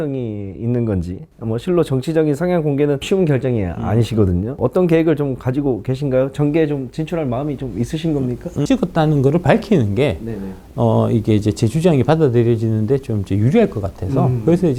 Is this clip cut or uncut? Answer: cut